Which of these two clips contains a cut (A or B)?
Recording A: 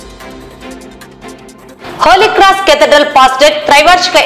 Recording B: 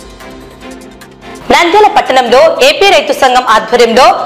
A